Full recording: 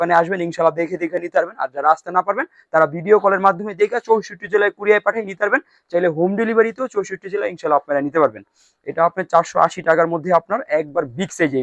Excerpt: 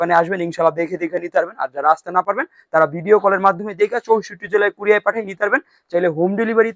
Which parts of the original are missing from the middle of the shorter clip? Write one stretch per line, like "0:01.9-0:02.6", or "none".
none